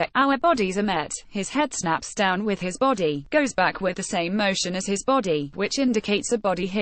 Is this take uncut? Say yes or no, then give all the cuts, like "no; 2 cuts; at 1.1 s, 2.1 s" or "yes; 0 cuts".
yes; 0 cuts